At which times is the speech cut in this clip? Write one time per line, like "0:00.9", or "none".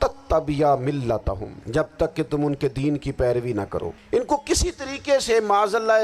0:01.5
0:04.0